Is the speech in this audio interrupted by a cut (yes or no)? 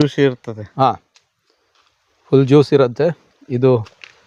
no